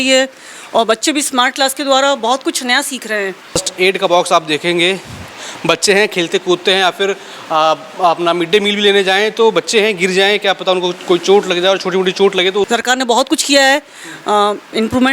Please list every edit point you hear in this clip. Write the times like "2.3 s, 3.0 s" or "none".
3.6 s, 12.7 s

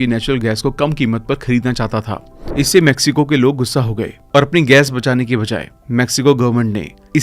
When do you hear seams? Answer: 2.3 s

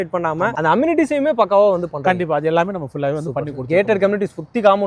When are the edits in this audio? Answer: none

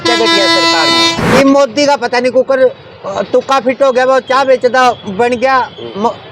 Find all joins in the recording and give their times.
1.2 s

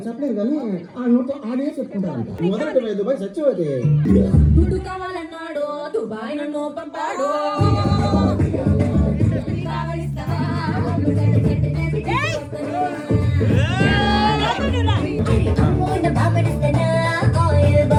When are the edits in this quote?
none

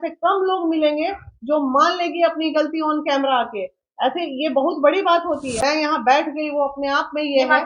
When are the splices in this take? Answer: 5.5 s

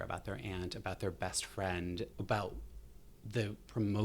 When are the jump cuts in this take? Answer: 2.1 s

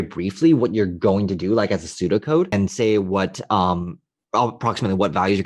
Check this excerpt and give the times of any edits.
2.5 s

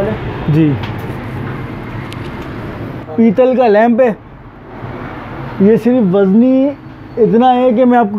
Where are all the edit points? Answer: 3.1 s

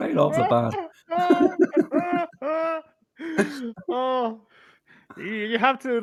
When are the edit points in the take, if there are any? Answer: none

